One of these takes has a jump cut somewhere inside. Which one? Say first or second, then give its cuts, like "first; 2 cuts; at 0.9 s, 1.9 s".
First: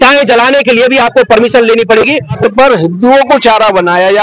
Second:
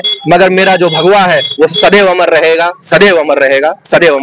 first; 1 cut; at 2.4 s